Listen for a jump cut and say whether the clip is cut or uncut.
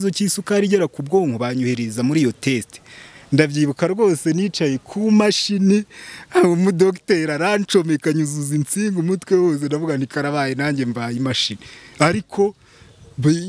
uncut